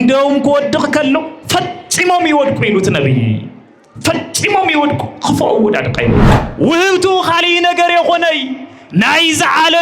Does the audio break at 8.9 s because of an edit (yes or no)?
no